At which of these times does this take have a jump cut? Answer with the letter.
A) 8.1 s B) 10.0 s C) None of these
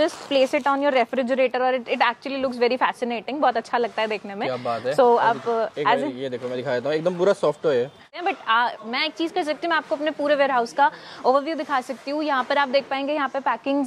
A